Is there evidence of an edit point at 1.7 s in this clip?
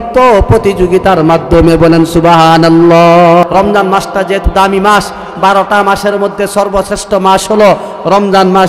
no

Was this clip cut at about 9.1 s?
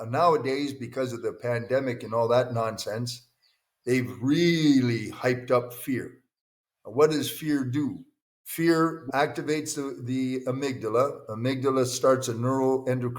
yes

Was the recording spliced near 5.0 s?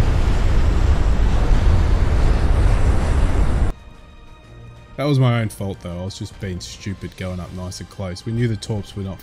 no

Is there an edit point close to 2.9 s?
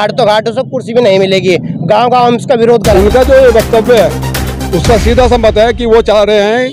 yes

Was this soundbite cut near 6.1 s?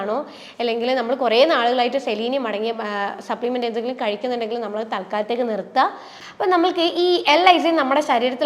yes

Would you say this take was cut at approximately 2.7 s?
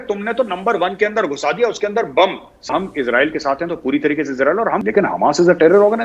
yes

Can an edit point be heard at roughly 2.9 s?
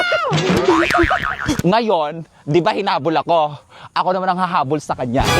no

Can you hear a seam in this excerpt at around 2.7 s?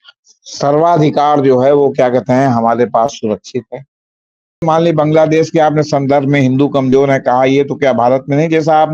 no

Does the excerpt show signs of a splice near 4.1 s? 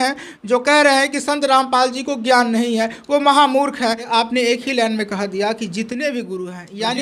yes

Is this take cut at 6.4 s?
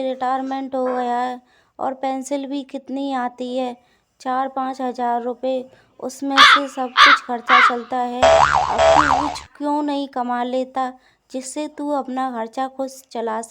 yes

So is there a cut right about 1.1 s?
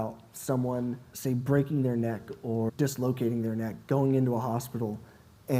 yes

